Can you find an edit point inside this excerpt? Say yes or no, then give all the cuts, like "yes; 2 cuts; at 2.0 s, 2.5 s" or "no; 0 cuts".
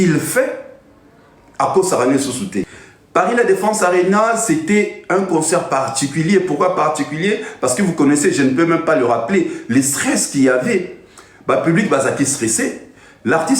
yes; 1 cut; at 2.6 s